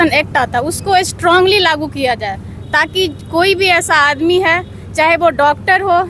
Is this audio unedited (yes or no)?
yes